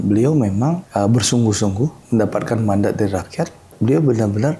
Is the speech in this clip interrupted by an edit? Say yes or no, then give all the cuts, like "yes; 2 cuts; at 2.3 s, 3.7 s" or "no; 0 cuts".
yes; 3 cuts; at 0.8 s, 2.0 s, 3.7 s